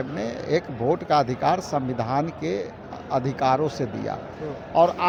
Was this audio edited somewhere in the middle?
no; 0 cuts

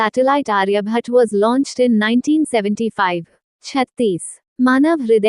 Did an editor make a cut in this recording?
no; 0 cuts

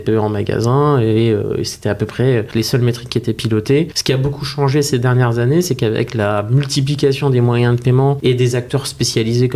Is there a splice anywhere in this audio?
yes; 3 cuts; at 2.5 s, 4.0 s, 8.2 s

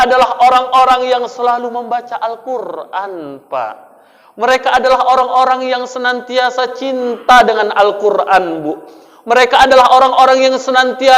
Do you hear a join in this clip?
no; 0 cuts

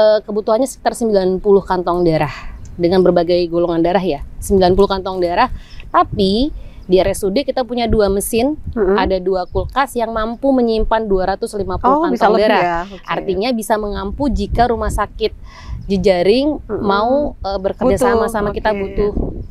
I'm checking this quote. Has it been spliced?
no; 0 cuts

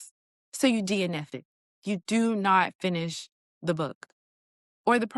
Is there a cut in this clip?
no; 0 cuts

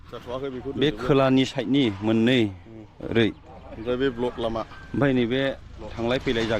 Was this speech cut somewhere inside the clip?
no; 0 cuts

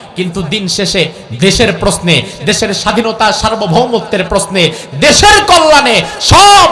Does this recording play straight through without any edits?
yes; 0 cuts

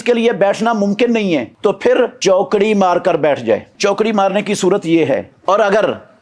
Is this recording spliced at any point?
yes; 4 cuts; at 1.5 s, 2.1 s, 3.7 s, 5.3 s

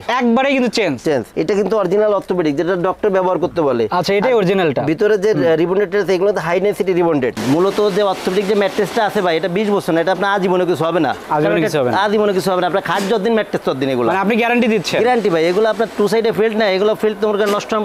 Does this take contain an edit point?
yes; 2 cuts; at 1.3 s, 7.4 s

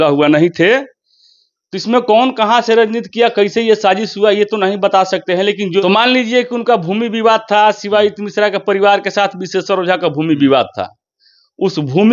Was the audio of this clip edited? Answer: yes; 1 cut; at 5.8 s

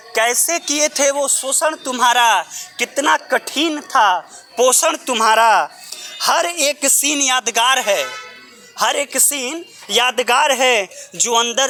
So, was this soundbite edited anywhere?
no; 0 cuts

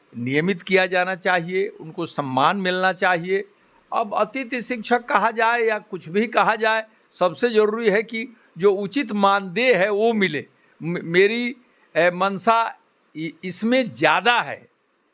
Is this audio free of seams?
yes; 0 cuts

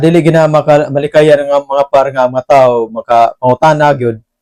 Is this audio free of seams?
yes; 0 cuts

